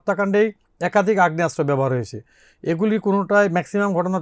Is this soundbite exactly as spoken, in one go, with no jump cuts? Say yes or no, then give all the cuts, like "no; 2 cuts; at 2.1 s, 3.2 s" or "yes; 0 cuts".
yes; 0 cuts